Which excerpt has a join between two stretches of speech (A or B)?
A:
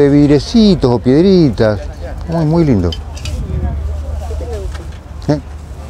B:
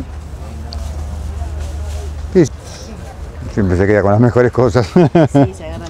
B